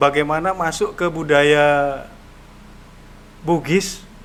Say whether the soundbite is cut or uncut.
uncut